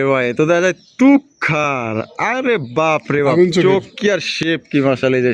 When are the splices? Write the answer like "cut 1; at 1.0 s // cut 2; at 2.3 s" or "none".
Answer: none